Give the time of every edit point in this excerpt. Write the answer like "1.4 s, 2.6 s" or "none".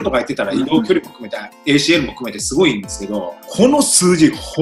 3.4 s